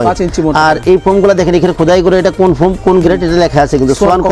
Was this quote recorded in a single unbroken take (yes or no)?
yes